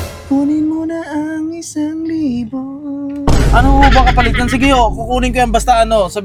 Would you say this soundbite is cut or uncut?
uncut